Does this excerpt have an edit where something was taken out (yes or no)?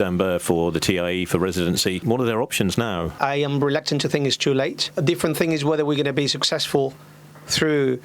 yes